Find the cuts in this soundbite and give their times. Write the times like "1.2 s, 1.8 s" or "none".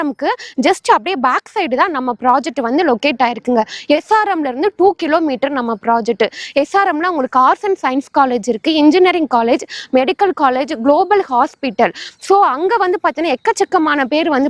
none